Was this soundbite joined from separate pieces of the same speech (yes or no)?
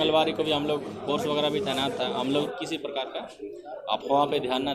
yes